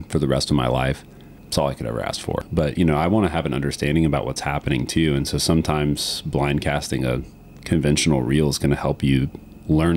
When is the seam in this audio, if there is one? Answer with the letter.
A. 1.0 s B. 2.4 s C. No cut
B